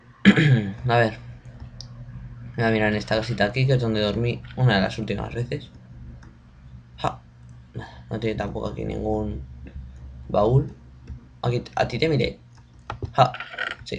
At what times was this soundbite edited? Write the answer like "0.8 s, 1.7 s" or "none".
10.5 s